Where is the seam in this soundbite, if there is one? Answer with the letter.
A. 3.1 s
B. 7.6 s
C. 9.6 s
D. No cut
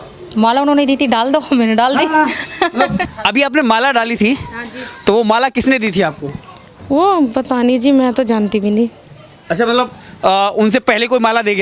A